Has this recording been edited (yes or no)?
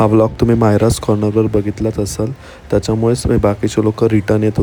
no